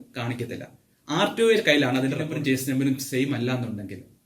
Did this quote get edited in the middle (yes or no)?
yes